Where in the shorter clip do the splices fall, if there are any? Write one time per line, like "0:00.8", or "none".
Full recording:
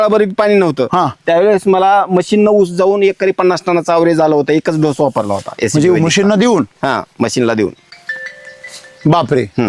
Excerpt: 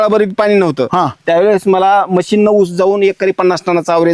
none